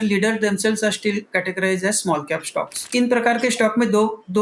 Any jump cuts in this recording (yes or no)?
yes